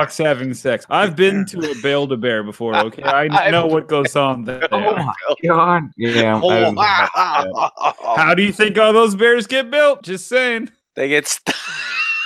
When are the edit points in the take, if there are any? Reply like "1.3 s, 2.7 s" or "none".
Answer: none